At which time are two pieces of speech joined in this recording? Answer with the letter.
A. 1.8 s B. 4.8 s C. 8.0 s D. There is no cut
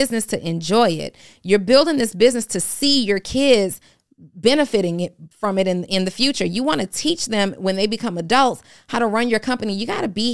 D